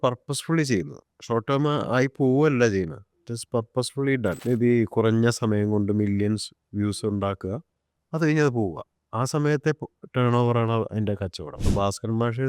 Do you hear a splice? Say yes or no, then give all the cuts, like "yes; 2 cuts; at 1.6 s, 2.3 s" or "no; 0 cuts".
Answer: yes; 2 cuts; at 4.4 s, 11.6 s